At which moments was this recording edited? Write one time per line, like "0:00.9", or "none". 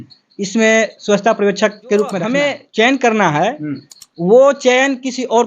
0:02.2